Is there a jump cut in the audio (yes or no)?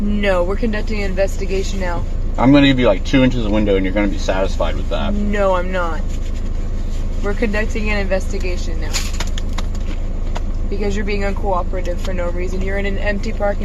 no